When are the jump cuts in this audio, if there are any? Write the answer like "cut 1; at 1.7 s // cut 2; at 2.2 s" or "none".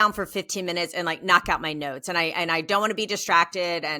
none